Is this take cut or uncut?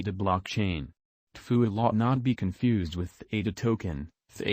cut